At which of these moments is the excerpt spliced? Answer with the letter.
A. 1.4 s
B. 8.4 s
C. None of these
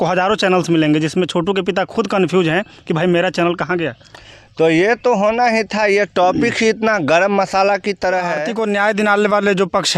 B